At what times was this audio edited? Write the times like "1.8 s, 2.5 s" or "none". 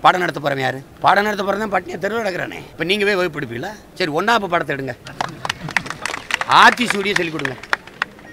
0.9 s, 2.6 s, 3.8 s, 5.1 s